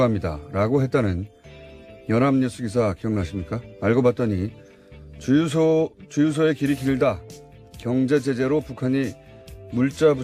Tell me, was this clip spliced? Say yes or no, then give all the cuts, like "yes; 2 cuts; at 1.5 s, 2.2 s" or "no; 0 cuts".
no; 0 cuts